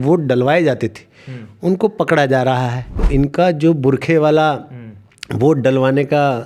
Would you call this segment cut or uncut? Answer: cut